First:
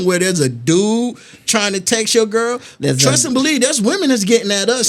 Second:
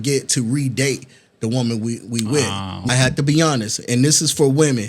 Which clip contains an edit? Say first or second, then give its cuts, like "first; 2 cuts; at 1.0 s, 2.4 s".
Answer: second; 1 cut; at 2.8 s